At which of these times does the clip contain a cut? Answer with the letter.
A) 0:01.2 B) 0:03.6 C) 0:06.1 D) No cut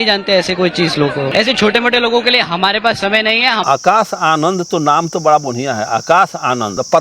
B